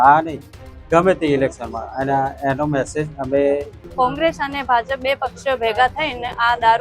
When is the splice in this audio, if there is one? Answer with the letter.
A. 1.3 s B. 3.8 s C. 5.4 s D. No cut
B